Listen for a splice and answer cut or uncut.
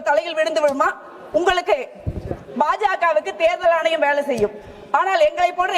uncut